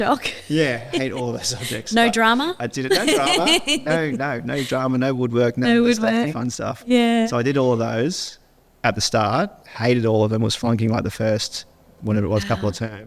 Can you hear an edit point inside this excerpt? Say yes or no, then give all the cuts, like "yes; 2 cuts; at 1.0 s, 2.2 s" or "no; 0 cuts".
no; 0 cuts